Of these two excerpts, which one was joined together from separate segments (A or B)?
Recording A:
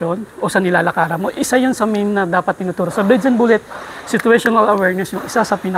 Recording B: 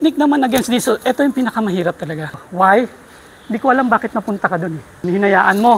B